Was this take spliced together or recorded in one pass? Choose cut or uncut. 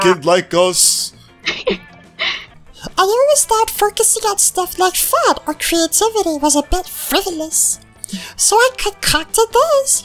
cut